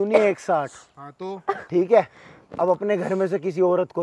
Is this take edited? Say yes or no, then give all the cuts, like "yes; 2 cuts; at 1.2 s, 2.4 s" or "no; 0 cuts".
no; 0 cuts